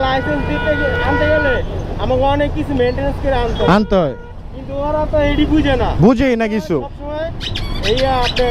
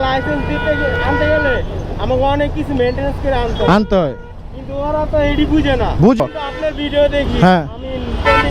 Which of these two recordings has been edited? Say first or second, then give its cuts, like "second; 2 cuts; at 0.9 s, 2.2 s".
second; 1 cut; at 6.2 s